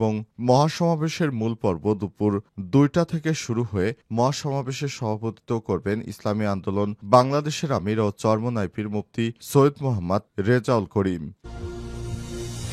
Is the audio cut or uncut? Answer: cut